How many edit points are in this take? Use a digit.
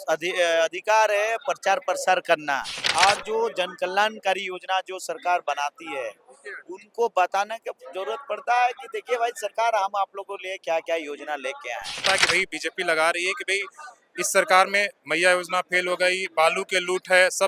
2